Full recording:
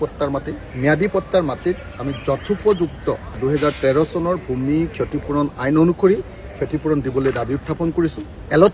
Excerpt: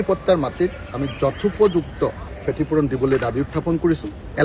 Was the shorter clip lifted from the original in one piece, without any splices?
no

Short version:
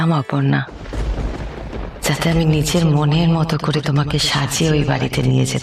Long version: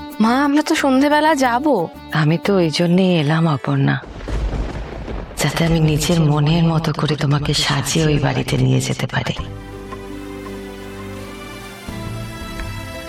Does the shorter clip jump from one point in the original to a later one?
no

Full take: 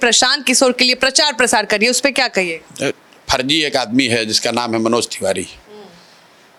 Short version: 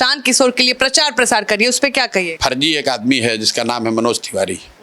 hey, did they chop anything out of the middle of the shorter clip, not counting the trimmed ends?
yes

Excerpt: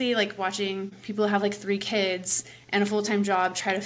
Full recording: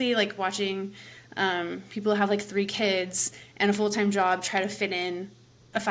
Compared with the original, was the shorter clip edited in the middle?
yes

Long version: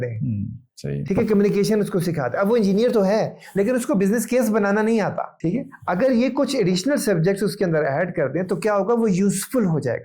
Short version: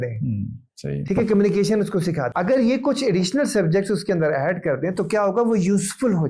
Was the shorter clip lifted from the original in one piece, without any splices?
no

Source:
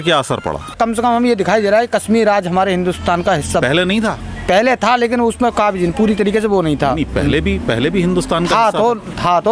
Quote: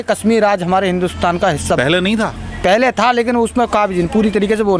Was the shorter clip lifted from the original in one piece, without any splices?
yes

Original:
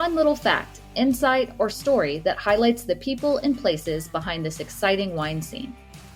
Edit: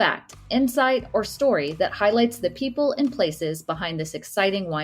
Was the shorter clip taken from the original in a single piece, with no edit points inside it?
yes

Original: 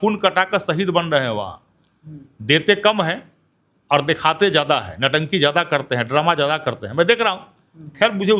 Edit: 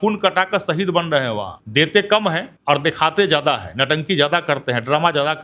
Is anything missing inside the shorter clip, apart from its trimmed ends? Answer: yes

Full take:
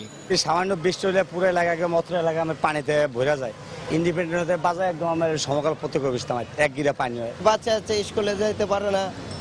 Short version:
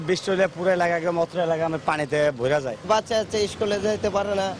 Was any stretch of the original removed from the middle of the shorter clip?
yes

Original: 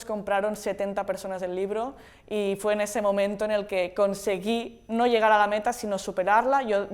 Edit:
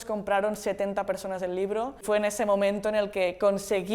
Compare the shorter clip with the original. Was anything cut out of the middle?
yes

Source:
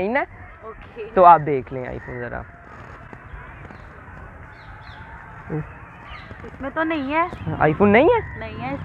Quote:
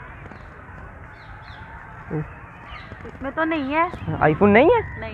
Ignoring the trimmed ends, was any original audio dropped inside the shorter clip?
no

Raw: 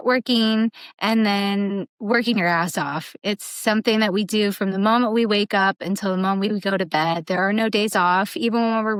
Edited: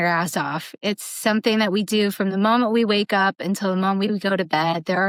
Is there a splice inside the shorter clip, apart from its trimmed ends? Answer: no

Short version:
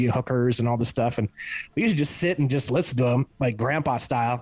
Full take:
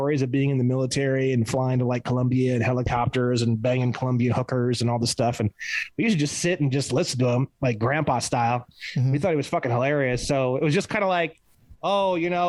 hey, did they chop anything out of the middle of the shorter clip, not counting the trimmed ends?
no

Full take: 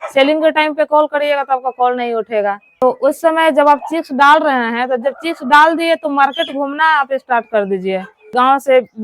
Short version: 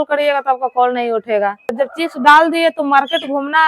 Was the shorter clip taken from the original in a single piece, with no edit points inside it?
no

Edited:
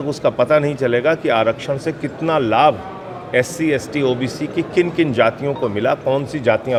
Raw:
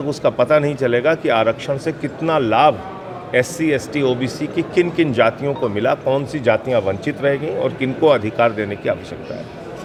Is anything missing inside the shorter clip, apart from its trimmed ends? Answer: no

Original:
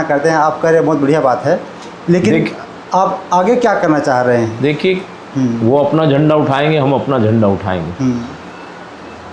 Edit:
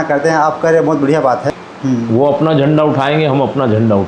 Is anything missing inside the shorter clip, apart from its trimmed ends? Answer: yes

